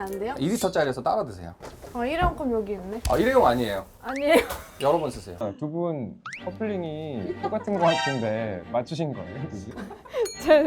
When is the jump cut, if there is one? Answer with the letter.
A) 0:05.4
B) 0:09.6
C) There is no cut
A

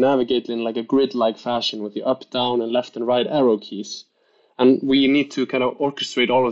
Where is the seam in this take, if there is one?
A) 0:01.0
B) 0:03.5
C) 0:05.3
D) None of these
D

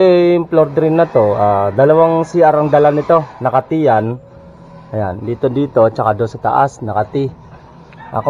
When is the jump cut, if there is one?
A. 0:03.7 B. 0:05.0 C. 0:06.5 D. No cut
D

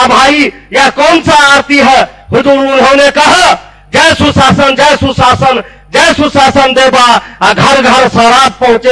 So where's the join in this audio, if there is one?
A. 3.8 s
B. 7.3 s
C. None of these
A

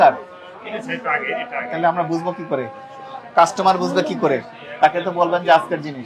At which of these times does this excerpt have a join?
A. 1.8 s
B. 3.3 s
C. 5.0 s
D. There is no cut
D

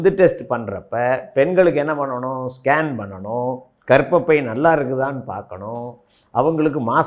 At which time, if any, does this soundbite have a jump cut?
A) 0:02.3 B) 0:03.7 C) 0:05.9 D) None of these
B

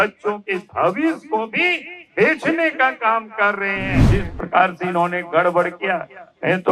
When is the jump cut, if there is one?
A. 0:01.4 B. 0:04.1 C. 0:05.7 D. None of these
B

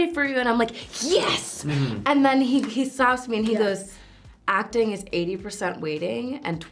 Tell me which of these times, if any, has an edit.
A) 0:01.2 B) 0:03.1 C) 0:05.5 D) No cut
D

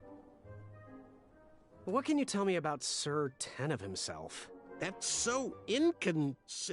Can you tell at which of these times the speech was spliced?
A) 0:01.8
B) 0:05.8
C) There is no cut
A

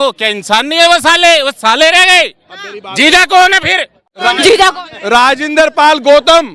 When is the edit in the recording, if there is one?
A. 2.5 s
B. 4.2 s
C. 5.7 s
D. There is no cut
B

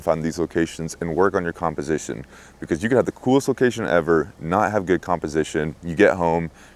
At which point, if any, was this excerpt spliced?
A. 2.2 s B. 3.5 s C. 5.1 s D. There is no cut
D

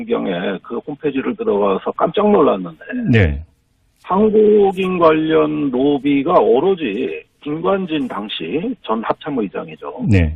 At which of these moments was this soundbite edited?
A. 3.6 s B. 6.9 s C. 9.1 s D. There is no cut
B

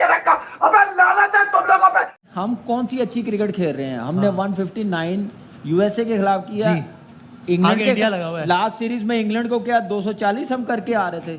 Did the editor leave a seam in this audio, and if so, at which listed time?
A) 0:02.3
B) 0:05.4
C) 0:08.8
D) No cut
A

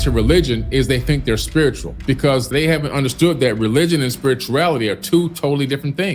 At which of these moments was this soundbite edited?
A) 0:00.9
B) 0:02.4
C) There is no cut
B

